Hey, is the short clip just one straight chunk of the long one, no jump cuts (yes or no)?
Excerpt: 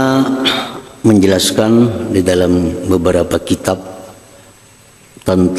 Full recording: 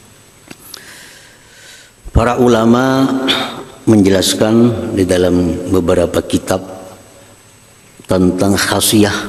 yes